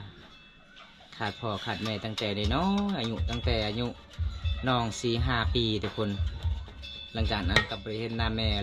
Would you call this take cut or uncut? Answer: uncut